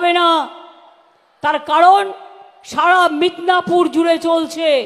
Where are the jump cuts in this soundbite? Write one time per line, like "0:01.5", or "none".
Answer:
none